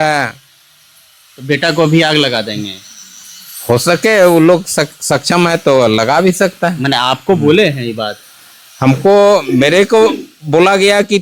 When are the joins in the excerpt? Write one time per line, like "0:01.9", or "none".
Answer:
none